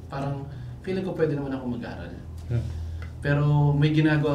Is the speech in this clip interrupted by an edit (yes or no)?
no